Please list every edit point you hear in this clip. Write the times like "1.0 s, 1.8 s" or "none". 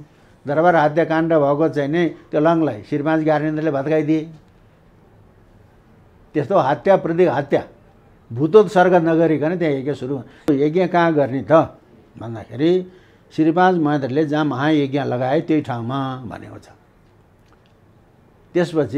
10.5 s